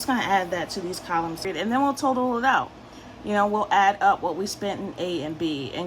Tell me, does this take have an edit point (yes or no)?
yes